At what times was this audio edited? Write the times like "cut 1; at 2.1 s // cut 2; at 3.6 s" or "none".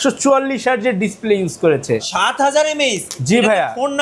cut 1; at 2.0 s

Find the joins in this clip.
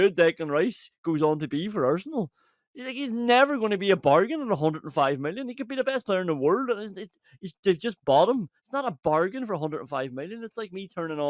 none

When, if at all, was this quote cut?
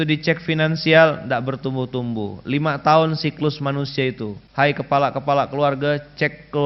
cut 1; at 4.4 s

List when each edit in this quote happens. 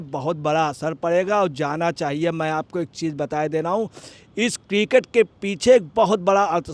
none

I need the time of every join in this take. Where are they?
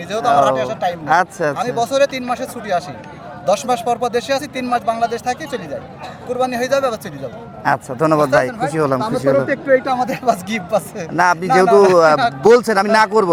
none

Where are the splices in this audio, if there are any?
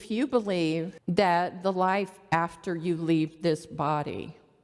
cut 1; at 0.9 s

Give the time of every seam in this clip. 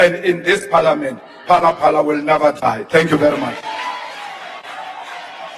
none

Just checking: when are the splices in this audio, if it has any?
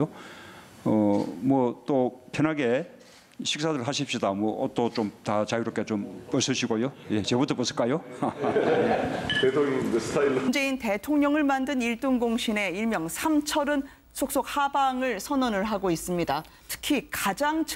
none

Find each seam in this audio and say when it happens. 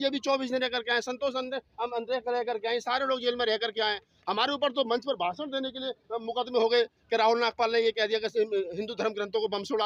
none

